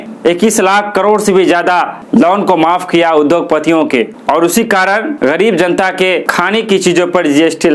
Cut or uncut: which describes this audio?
cut